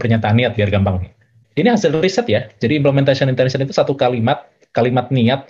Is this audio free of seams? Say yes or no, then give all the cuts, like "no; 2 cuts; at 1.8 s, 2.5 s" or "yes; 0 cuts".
no; 1 cut; at 1.4 s